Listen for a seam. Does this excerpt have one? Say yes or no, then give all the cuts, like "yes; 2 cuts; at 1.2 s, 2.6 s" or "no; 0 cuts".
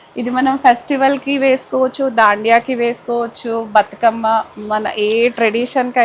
no; 0 cuts